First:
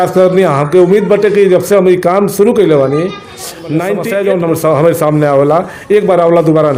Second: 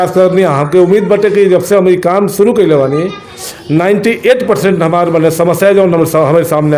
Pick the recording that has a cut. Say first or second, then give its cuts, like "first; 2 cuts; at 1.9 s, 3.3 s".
first; 1 cut; at 3.9 s